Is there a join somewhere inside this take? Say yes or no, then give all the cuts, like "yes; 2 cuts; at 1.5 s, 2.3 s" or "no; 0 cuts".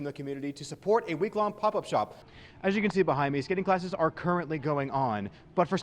yes; 1 cut; at 2.2 s